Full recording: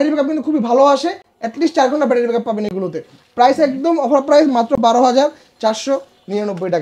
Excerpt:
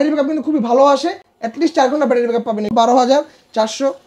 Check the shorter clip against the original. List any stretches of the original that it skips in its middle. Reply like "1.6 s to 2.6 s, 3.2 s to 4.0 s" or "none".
2.7 s to 4.8 s